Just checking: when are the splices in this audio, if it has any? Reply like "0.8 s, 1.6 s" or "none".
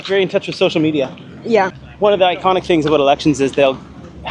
1.8 s